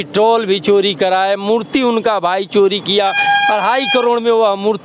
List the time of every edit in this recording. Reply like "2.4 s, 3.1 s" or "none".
none